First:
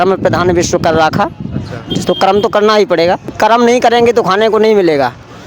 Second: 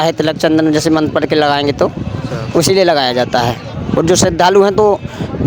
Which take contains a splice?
first; 1 cut; at 3.3 s

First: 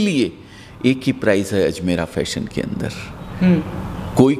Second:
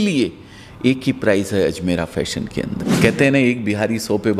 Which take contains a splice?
second; 1 cut; at 2.9 s

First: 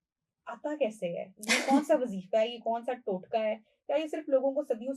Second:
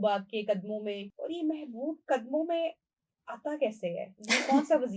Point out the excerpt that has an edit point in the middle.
second; 1 cut; at 1.1 s

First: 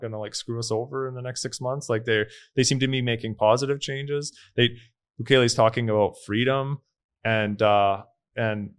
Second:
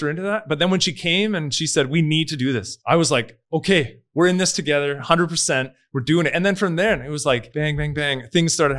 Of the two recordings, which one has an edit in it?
second; 2 cuts; at 2.7 s, 7.5 s

